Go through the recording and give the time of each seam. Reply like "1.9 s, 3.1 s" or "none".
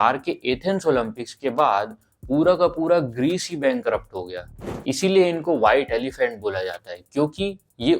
4.5 s